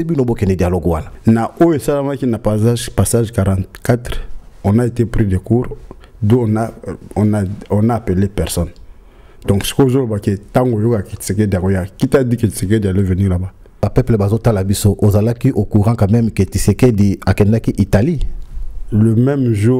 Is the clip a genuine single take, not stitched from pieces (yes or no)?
no